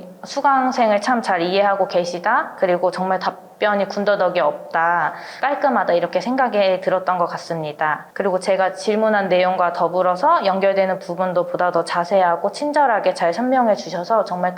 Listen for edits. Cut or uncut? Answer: cut